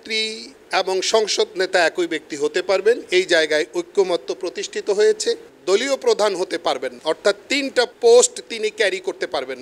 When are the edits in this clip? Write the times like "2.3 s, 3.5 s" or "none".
none